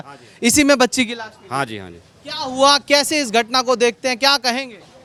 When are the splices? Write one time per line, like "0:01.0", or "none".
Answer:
none